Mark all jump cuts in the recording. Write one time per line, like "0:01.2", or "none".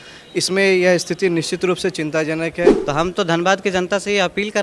0:02.8